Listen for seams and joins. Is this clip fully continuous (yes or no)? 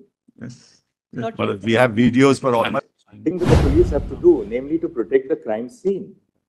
no